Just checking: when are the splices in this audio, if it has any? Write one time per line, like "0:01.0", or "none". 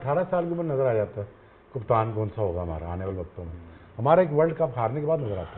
none